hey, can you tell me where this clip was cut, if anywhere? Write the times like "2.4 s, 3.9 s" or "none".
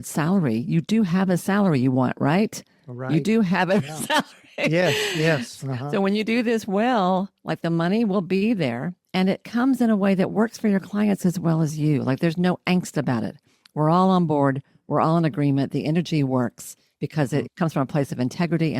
17.5 s